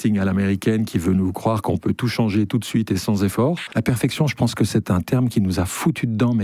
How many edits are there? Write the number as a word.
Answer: one